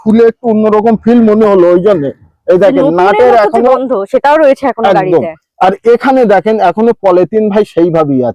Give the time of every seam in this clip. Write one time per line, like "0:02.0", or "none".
none